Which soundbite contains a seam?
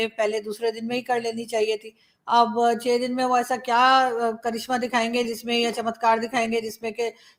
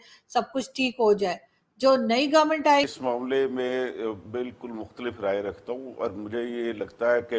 second; 1 cut; at 2.9 s

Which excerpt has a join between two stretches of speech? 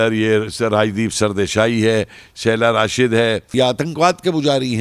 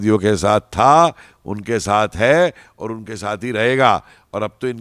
first; 1 cut; at 3.5 s

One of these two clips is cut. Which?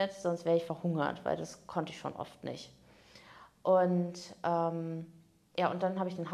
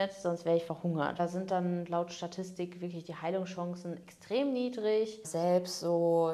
second; 2 cuts; at 1.2 s, 5.2 s

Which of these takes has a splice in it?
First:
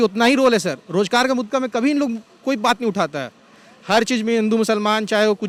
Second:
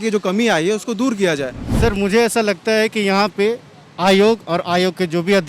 second; 1 cut; at 1.6 s

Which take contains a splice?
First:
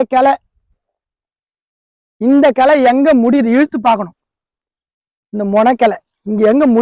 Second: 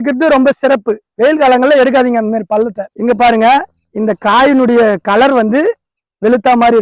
second; 1 cut; at 2.8 s

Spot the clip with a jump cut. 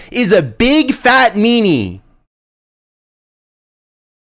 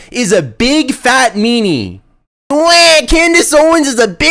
second; 1 cut; at 2.5 s

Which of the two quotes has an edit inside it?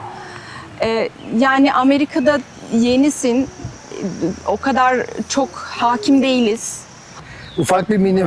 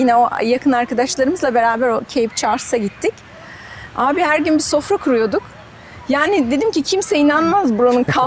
first; 1 cut; at 7.1 s

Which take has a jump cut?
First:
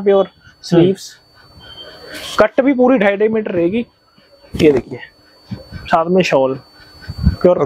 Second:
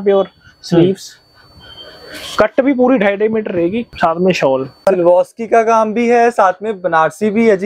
second; 2 cuts; at 3.9 s, 4.9 s

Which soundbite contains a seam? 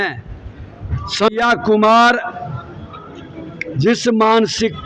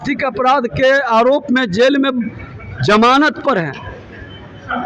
first; 1 cut; at 1.3 s

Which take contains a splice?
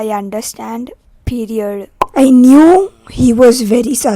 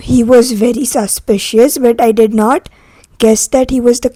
first; 1 cut; at 1.9 s

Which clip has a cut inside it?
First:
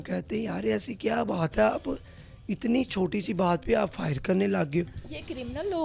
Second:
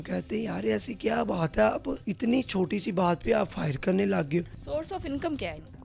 second; 2 cuts; at 2.0 s, 4.6 s

